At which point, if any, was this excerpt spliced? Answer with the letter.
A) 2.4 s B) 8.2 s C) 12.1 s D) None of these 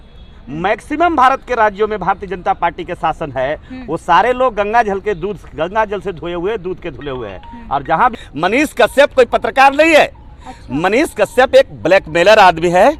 B